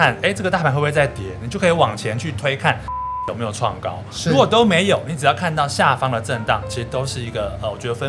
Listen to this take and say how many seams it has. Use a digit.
1